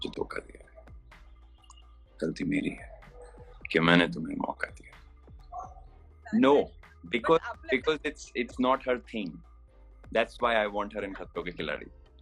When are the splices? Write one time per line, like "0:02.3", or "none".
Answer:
0:06.2